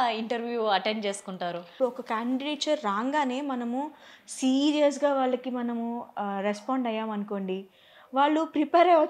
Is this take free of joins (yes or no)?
no